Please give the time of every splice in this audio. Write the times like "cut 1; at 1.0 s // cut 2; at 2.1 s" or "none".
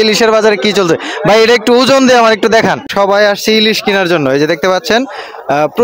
cut 1; at 2.9 s